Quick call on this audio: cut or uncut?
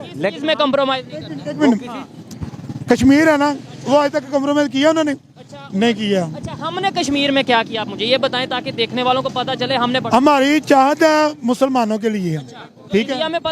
uncut